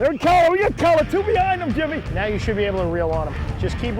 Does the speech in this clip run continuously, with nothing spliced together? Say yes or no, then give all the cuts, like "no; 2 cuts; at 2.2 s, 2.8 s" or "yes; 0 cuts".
no; 1 cut; at 2.1 s